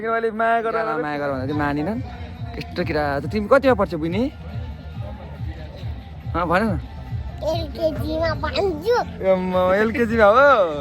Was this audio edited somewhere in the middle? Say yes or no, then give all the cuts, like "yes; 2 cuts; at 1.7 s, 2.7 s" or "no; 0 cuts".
yes; 1 cut; at 1.0 s